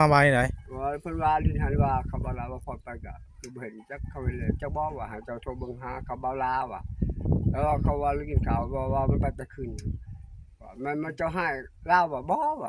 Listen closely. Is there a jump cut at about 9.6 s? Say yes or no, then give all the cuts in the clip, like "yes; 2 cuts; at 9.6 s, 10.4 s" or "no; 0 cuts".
no; 0 cuts